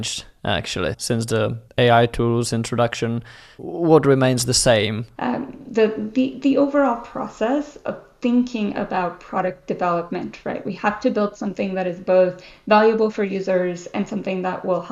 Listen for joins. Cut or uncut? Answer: cut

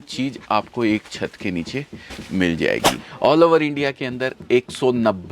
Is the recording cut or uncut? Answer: cut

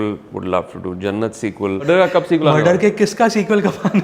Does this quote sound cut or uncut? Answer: cut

